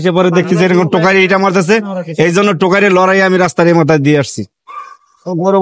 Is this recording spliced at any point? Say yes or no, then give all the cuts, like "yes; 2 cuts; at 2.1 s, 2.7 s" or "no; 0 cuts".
no; 0 cuts